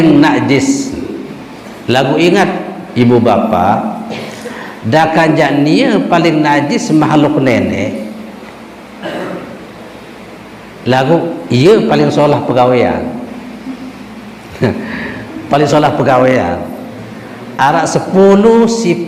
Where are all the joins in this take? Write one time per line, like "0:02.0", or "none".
none